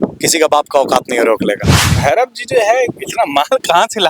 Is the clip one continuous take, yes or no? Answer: no